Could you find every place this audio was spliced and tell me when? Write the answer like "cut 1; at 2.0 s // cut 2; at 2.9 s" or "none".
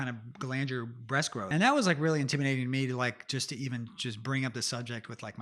cut 1; at 1.5 s